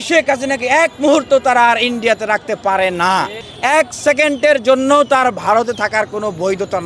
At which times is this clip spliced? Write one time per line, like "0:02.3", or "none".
0:03.4